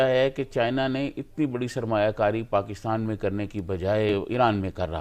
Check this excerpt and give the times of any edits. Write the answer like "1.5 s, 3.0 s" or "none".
4.1 s